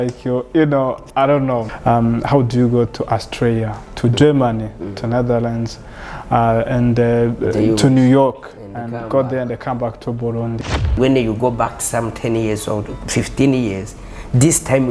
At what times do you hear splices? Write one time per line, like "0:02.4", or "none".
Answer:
0:01.7
0:11.0